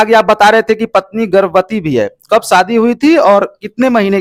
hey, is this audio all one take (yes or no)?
yes